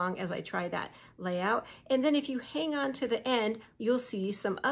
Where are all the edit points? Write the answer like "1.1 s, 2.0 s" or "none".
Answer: 3.7 s